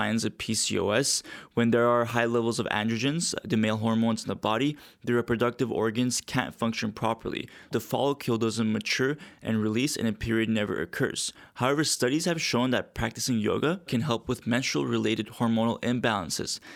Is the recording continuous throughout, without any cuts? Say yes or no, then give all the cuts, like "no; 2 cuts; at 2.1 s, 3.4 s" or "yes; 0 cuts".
yes; 0 cuts